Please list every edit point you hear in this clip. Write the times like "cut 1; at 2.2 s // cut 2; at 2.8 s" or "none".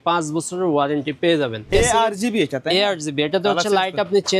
cut 1; at 1.6 s